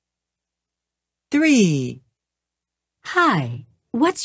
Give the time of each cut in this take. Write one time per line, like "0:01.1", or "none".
none